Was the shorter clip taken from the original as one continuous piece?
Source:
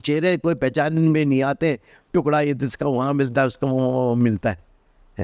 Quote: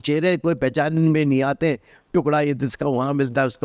yes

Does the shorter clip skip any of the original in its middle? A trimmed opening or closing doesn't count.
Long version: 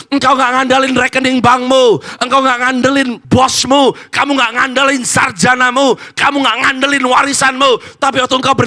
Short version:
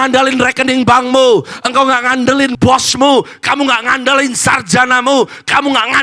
yes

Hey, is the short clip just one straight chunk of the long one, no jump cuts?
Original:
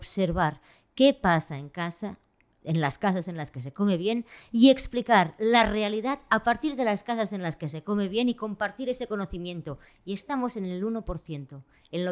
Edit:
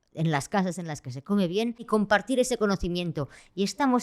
no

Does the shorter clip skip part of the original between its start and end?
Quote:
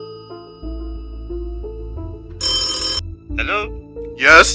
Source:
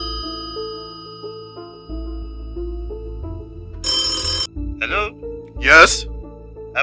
yes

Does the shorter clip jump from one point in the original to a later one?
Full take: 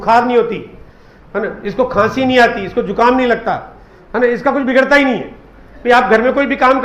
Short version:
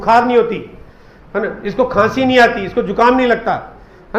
no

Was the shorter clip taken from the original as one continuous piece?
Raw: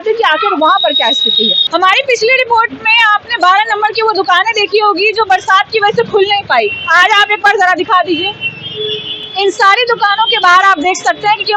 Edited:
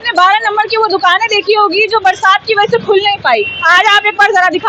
yes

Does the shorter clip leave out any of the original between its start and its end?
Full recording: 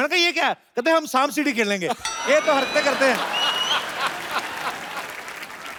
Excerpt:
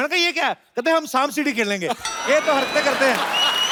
no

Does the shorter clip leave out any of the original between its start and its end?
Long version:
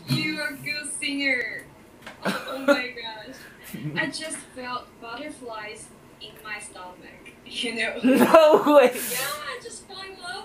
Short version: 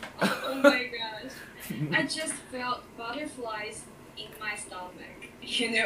no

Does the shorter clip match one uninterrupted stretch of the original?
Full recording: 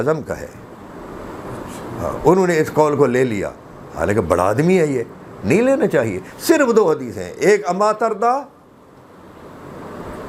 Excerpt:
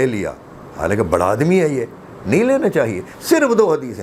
yes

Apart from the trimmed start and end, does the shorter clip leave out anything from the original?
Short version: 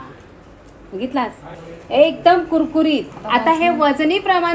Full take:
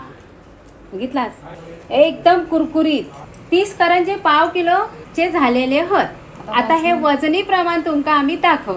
yes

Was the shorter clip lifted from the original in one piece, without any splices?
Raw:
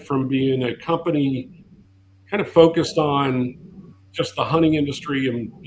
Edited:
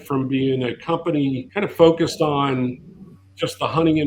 no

